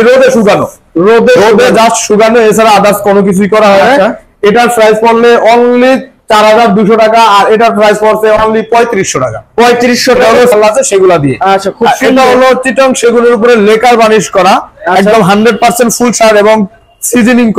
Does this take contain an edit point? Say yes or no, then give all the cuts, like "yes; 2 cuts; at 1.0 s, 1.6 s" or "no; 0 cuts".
yes; 1 cut; at 10.5 s